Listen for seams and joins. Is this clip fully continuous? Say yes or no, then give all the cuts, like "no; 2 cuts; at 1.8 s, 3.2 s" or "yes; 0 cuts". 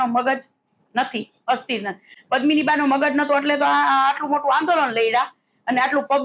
yes; 0 cuts